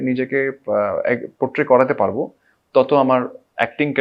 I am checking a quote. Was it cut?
no; 0 cuts

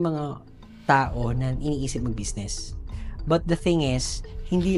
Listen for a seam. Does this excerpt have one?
no; 0 cuts

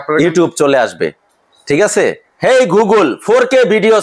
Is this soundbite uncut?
no; 1 cut; at 2.3 s

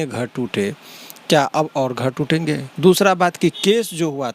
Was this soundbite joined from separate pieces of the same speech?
yes; 1 cut; at 2.7 s

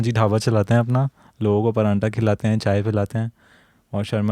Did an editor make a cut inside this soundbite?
no; 0 cuts

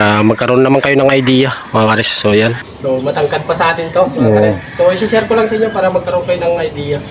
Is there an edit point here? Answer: yes; 1 cut; at 2.6 s

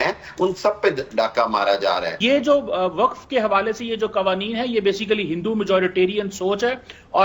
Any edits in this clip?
yes; 1 cut; at 2.2 s

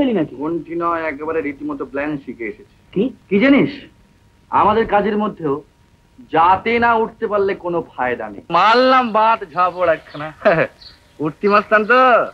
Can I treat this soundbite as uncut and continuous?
no; 2 cuts; at 3.2 s, 8.5 s

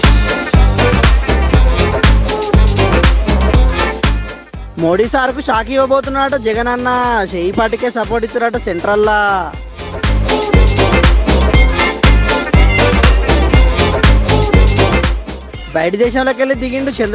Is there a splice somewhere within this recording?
no; 0 cuts

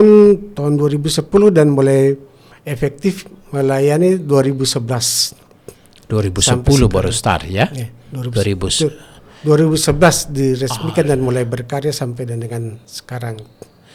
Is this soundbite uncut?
yes; 0 cuts

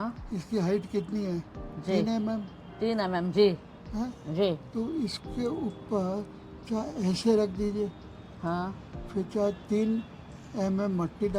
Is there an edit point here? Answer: no; 0 cuts

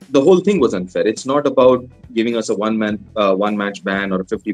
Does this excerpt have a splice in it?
no; 0 cuts

